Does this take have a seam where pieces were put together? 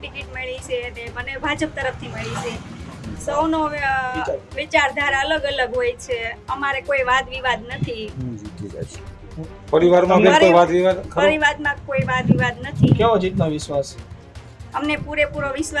no; 0 cuts

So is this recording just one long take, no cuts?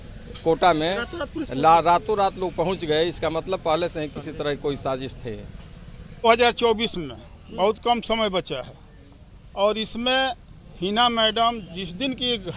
no; 1 cut; at 6.2 s

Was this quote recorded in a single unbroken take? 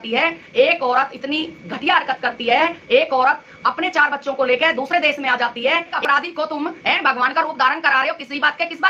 no; 1 cut; at 6.0 s

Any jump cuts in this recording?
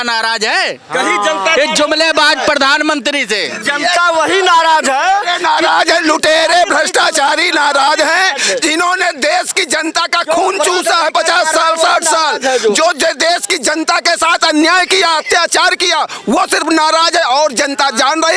no; 0 cuts

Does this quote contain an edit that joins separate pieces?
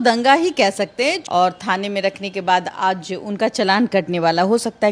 yes; 1 cut; at 1.2 s

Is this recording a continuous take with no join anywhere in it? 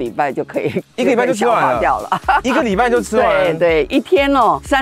yes; 0 cuts

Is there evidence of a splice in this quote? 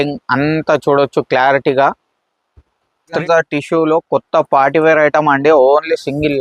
yes; 1 cut; at 3.2 s

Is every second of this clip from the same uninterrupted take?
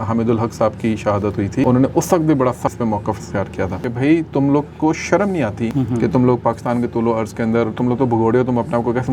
no; 4 cuts; at 1.6 s, 2.7 s, 3.8 s, 5.7 s

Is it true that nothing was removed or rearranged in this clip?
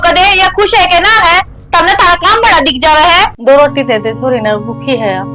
no; 1 cut; at 3.4 s

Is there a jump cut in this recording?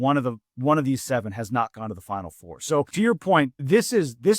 yes; 1 cut; at 3.2 s

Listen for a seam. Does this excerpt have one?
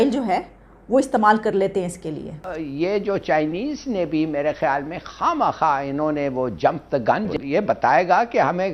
yes; 2 cuts; at 2.6 s, 7.3 s

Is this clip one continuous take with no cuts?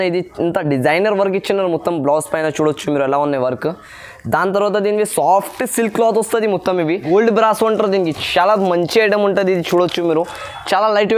no; 1 cut; at 7.0 s

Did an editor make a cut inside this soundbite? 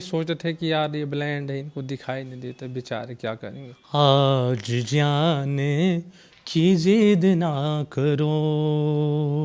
yes; 1 cut; at 3.7 s

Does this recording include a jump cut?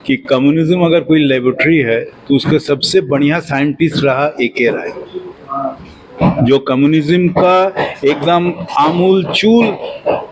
no; 0 cuts

